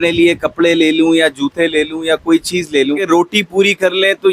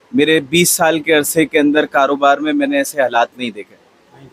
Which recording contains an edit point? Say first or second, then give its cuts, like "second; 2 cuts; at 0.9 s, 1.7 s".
first; 1 cut; at 3.0 s